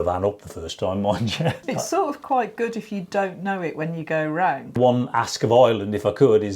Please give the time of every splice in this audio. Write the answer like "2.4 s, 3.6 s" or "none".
1.6 s, 4.7 s